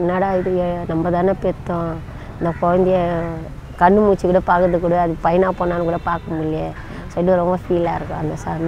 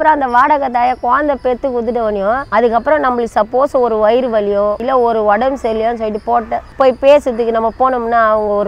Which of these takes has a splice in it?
second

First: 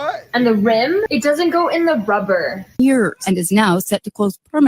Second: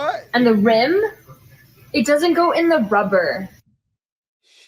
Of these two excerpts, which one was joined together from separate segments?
first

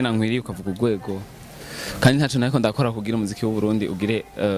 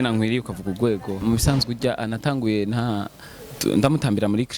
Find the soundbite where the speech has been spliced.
second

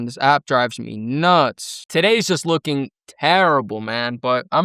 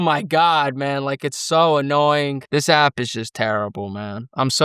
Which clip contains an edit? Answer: first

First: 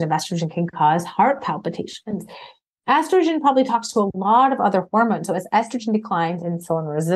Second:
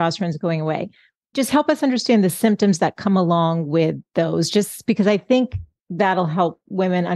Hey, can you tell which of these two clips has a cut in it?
second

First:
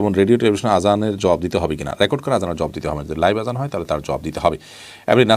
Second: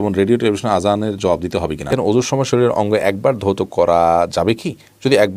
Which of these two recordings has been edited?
second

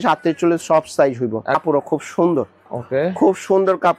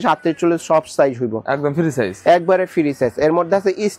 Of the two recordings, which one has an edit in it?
first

